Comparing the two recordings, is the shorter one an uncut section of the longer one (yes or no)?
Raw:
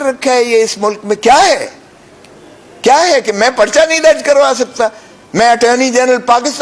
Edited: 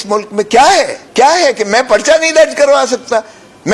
no